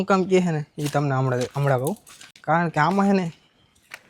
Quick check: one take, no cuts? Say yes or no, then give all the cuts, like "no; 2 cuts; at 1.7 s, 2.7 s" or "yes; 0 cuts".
yes; 0 cuts